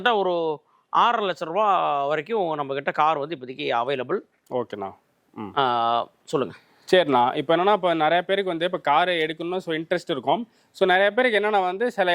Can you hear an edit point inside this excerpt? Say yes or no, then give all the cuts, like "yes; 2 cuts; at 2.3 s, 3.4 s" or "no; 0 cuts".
no; 0 cuts